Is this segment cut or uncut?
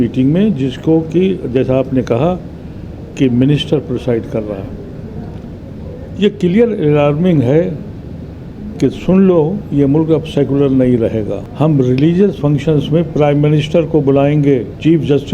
cut